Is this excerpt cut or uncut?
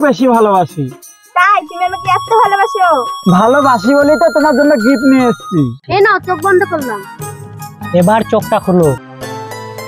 cut